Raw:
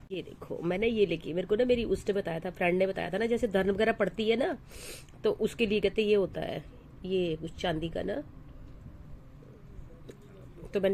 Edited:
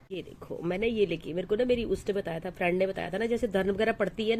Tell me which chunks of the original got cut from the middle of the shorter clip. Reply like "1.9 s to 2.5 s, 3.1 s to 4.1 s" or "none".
none